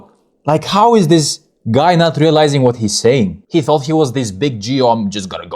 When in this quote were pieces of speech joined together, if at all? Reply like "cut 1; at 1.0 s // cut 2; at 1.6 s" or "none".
cut 1; at 3.4 s